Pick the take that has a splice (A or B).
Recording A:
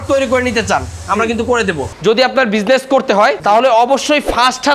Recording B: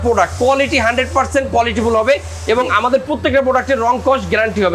A